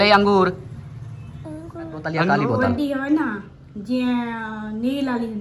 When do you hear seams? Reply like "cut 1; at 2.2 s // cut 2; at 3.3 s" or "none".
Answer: cut 1; at 2.3 s